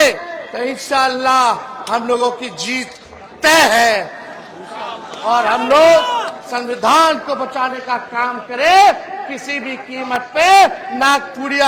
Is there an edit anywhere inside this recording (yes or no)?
no